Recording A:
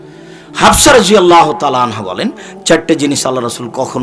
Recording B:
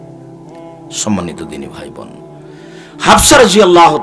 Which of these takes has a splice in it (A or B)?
B